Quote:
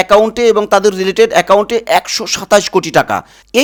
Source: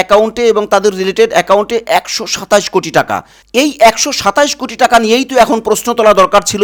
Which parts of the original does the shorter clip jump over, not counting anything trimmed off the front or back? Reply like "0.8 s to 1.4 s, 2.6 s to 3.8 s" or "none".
none